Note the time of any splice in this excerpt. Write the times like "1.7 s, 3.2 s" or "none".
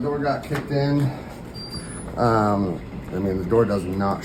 none